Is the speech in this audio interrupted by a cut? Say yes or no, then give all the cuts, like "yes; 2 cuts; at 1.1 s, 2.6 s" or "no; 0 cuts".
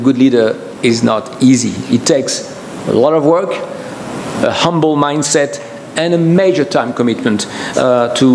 no; 0 cuts